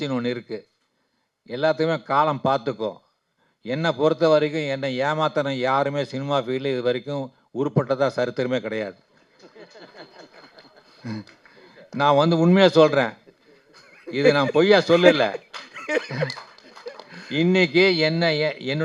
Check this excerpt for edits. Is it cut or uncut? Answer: uncut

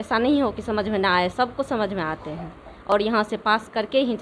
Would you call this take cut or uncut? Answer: uncut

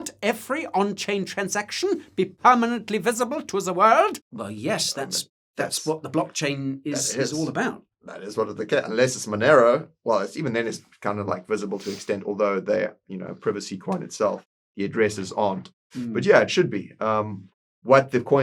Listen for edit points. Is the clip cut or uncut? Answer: uncut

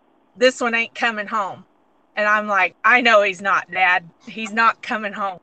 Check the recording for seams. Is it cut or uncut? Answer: uncut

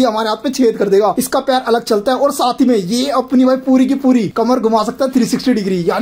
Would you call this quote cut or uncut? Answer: cut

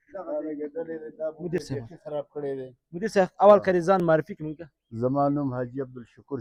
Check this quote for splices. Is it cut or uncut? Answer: uncut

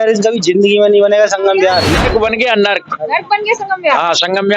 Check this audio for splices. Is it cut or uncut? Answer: cut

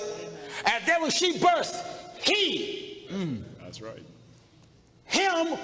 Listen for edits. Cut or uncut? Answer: uncut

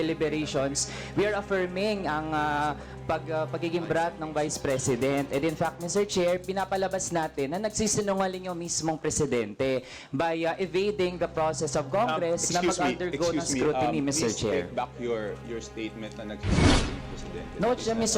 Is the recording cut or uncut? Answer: uncut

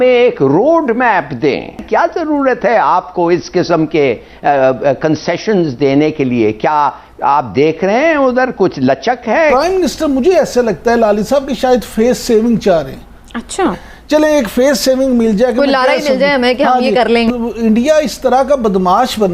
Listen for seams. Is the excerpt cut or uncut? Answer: cut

